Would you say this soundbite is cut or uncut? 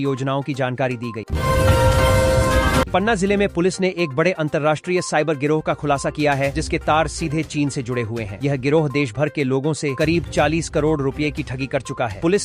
uncut